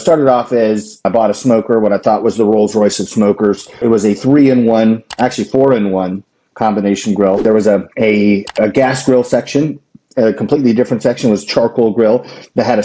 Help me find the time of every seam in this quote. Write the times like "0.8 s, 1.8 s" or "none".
1.0 s, 3.8 s, 7.4 s